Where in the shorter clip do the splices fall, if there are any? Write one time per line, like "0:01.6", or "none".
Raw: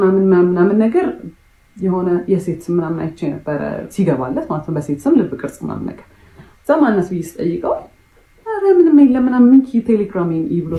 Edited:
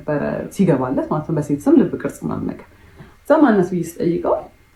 none